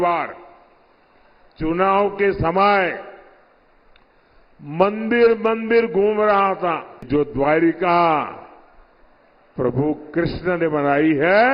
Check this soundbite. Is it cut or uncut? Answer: cut